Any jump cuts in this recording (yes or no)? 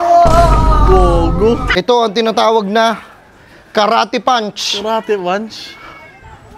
yes